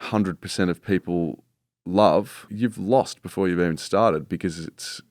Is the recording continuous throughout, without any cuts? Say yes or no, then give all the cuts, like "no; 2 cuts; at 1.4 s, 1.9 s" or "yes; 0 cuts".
no; 1 cut; at 2.5 s